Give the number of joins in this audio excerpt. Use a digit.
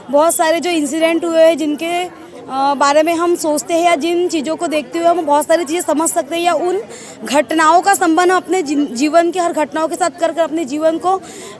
0